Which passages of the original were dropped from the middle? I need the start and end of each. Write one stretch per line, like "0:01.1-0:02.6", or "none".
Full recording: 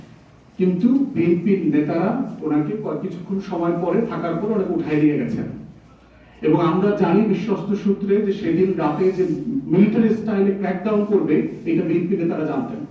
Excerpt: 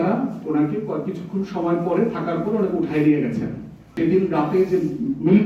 0:05.9-0:08.4